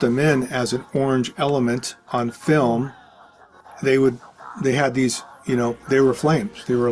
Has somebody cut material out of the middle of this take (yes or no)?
no